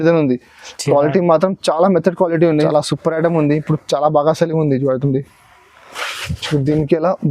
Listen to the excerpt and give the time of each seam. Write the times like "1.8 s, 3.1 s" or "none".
2.5 s